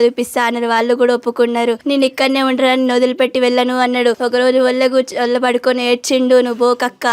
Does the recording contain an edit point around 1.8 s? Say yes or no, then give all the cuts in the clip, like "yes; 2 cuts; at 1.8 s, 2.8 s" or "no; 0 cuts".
yes; 2 cuts; at 1.8 s, 4.2 s